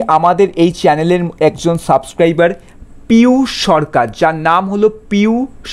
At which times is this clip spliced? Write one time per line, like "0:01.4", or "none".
none